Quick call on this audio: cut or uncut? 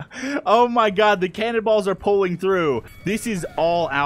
cut